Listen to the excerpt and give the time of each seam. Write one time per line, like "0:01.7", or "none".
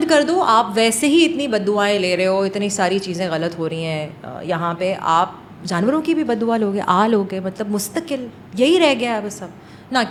none